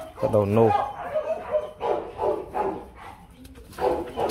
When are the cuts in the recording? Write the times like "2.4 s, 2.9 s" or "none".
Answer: none